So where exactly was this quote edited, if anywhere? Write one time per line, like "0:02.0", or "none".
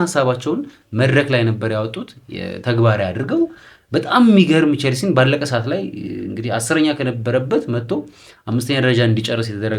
none

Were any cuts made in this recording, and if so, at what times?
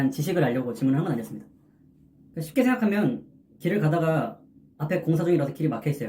0:02.1

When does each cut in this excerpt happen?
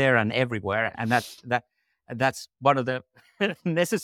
none

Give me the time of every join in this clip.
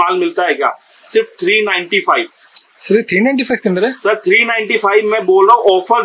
none

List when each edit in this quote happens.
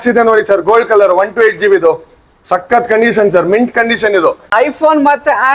0:04.5

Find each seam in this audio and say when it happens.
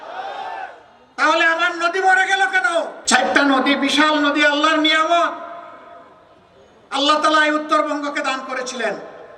0:03.0

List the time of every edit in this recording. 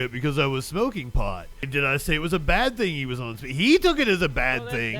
0:01.7

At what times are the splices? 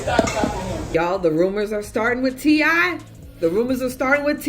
0:00.9

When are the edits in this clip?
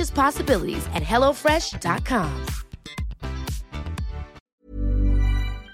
0:04.4

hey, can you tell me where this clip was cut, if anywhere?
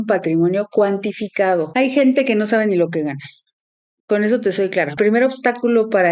0:01.7
0:04.9

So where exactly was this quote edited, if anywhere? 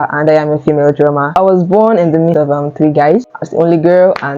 0:01.3
0:02.3
0:03.4

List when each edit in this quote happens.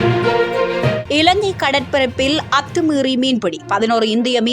none

